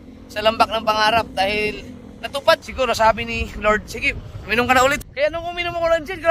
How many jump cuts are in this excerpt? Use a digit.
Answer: 2